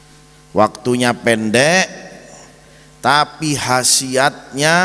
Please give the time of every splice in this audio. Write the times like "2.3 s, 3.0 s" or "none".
none